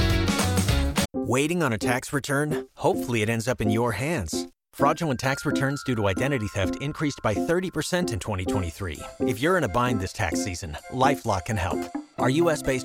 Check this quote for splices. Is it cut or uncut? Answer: cut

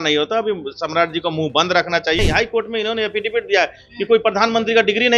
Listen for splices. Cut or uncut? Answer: cut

